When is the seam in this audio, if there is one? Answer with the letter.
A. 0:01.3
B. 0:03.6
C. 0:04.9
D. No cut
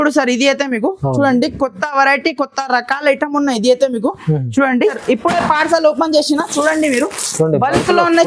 C